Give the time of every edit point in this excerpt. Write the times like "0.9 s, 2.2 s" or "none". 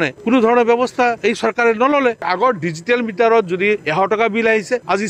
2.2 s

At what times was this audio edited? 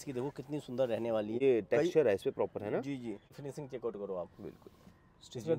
1.4 s, 3.3 s

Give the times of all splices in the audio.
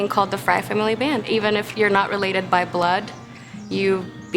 1.2 s

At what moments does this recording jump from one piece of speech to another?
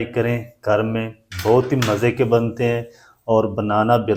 none

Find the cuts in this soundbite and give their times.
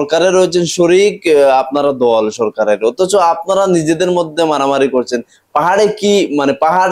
none

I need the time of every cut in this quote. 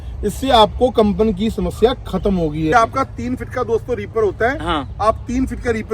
2.7 s

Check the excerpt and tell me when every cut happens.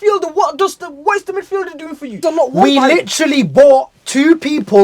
2.2 s

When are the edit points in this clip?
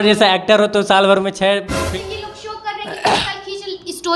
1.8 s

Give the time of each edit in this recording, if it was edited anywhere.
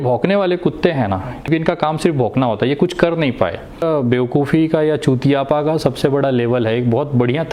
1.5 s, 3.8 s

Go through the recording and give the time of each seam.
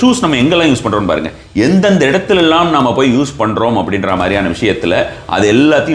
none

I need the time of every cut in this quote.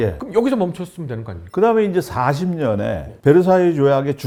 none

